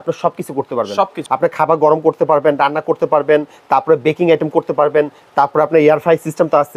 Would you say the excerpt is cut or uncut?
cut